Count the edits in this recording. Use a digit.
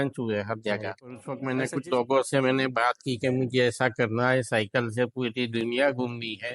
1